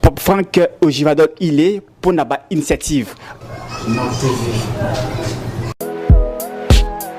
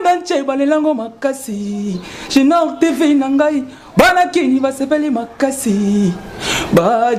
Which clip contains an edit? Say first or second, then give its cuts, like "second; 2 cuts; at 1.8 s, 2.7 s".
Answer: first; 1 cut; at 5.7 s